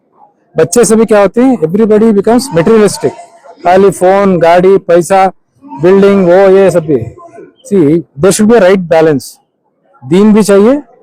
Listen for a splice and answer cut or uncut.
uncut